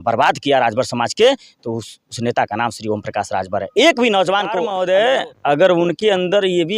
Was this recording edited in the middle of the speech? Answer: yes; 1 cut; at 4.7 s

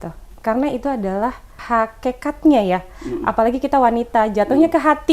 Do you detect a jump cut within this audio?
yes; 1 cut; at 1.5 s

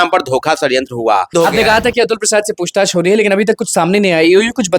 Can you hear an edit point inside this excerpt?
yes; 1 cut; at 1.3 s

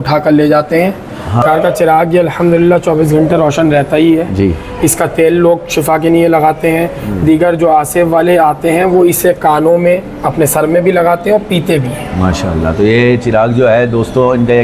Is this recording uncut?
no; 1 cut; at 1.4 s

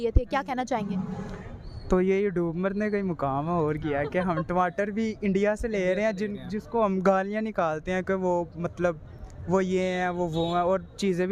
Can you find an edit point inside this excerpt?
no; 0 cuts

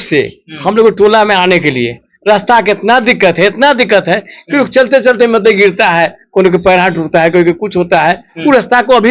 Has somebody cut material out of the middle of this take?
no; 0 cuts

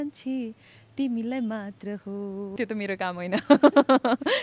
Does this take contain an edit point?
yes; 1 cut; at 2.5 s

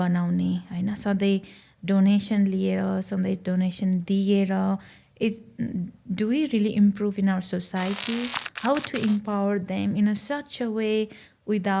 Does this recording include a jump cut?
yes; 1 cut; at 8.5 s

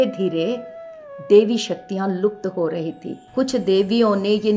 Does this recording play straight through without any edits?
no; 1 cut; at 3.1 s

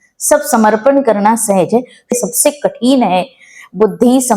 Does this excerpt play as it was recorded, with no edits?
no; 1 cut; at 2.2 s

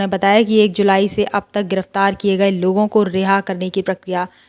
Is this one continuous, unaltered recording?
yes; 0 cuts

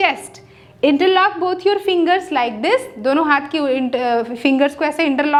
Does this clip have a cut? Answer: no; 0 cuts

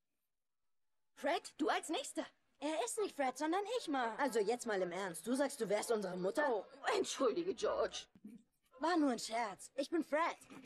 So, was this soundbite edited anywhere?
yes; 2 cuts; at 4.1 s, 6.4 s

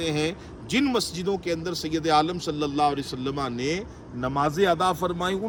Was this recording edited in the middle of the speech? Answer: no; 0 cuts

